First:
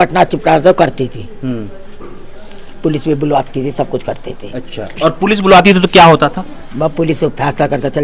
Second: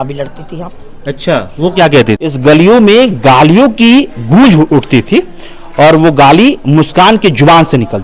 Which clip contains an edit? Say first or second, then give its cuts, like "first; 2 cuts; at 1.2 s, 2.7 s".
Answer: second; 1 cut; at 2.3 s